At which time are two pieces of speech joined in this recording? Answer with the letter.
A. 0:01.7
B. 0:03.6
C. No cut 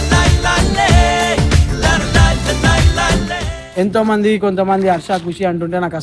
B